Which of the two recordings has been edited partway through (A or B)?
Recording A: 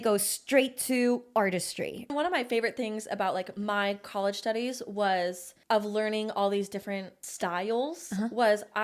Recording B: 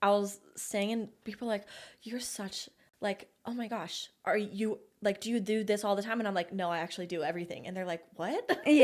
A